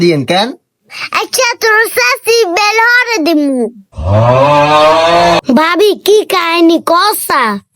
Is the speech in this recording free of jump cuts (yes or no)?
no